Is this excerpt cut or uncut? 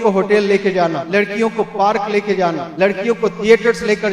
cut